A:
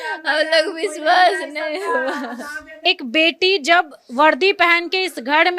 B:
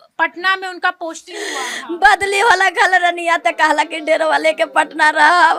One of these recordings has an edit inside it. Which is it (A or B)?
A